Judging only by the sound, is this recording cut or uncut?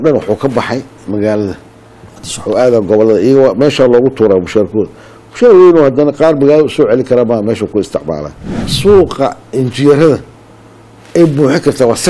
cut